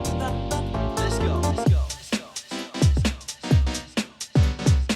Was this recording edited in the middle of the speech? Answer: yes; 1 cut; at 1.9 s

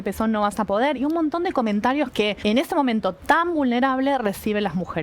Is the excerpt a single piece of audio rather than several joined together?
no; 1 cut; at 2.4 s

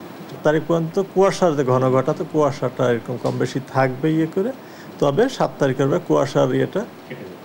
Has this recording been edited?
no; 0 cuts

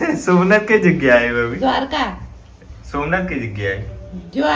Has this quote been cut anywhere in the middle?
no; 0 cuts

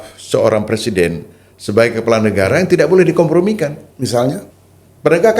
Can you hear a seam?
yes; 1 cut; at 4.5 s

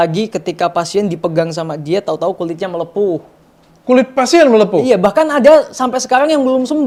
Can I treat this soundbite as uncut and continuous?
yes; 0 cuts

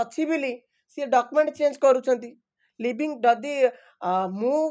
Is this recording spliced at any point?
no; 0 cuts

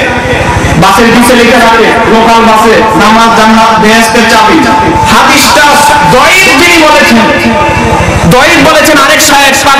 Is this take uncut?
no; 1 cut; at 5.0 s

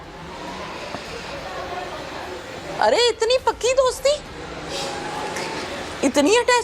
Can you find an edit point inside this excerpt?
no; 0 cuts

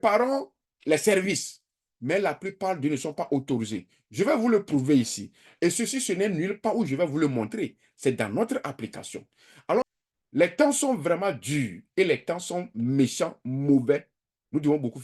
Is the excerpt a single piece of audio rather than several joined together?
no; 1 cut; at 9.8 s

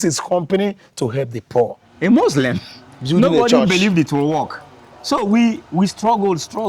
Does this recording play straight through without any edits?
no; 1 cut; at 1.8 s

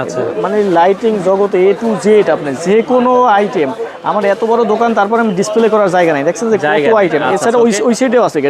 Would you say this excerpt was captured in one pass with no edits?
yes; 0 cuts

